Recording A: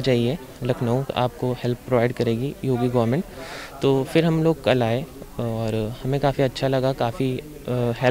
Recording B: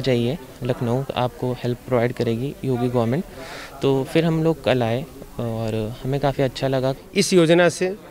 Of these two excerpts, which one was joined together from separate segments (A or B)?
B